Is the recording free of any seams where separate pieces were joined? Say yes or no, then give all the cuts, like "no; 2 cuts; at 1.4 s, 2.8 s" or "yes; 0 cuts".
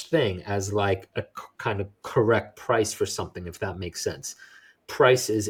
yes; 0 cuts